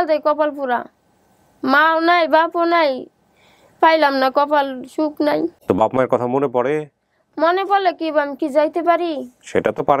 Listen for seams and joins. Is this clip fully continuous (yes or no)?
no